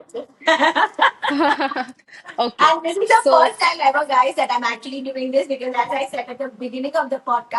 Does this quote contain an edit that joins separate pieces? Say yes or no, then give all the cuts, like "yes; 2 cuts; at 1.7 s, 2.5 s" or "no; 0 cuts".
no; 0 cuts